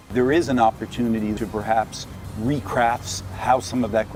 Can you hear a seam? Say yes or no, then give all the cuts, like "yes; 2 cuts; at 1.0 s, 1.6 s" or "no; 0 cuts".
no; 0 cuts